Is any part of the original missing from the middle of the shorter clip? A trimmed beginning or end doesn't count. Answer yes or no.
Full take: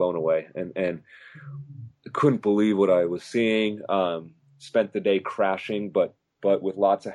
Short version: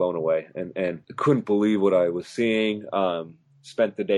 yes